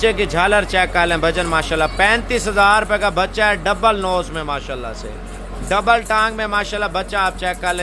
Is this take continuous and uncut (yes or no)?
yes